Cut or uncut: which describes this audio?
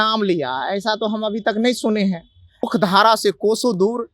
cut